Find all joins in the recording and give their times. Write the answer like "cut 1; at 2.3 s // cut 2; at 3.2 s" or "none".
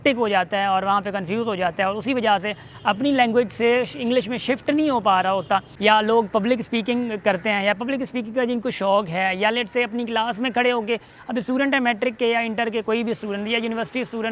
cut 1; at 5.7 s